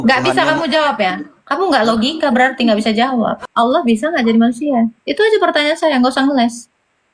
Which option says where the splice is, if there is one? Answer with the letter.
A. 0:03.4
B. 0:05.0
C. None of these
A